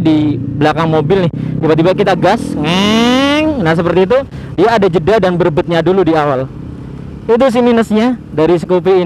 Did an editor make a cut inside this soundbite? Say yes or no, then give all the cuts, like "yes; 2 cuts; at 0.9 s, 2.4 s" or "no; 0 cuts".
no; 0 cuts